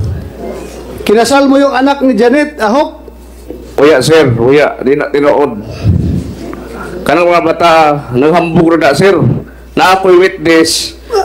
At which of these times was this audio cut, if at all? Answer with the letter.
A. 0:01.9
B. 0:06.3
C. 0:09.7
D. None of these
D